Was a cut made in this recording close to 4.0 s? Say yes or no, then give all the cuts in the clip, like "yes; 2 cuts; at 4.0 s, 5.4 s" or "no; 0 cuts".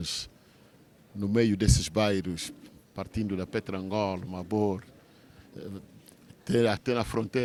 no; 0 cuts